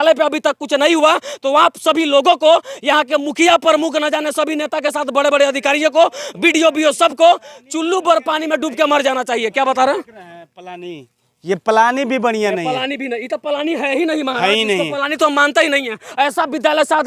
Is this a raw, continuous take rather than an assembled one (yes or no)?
yes